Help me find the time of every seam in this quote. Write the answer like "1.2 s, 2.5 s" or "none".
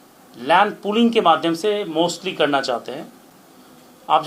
none